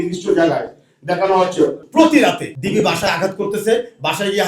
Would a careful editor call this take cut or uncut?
cut